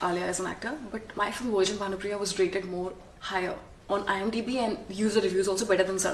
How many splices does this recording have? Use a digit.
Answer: 1